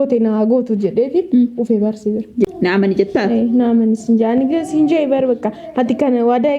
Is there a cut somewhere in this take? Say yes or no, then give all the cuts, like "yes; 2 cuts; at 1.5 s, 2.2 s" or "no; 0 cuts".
yes; 1 cut; at 2.5 s